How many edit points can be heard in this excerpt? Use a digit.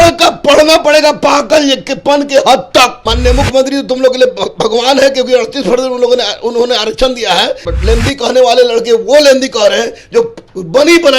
2